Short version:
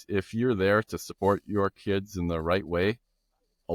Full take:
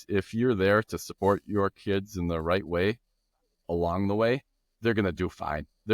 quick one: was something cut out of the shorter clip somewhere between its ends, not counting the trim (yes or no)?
no